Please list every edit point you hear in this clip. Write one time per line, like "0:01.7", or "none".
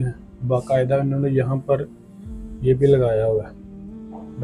none